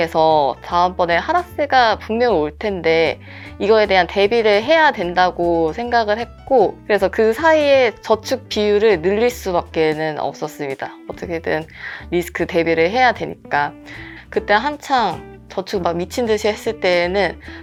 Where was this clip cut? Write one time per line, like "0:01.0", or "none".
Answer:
none